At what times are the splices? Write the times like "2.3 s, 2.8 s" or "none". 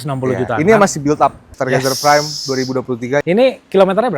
1.5 s, 3.2 s